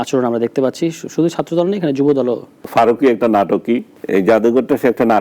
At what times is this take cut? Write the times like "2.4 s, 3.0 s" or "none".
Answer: 2.5 s, 3.9 s